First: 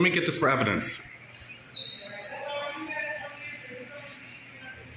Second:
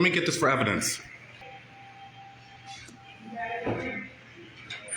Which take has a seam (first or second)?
second